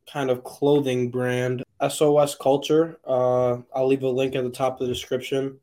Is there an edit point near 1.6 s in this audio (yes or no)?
yes